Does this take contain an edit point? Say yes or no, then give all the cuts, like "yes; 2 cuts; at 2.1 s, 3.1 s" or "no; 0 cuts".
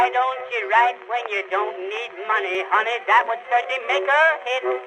yes; 1 cut; at 2.5 s